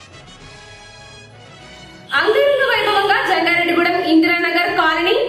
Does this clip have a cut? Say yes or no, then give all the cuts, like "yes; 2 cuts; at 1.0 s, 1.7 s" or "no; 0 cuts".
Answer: no; 0 cuts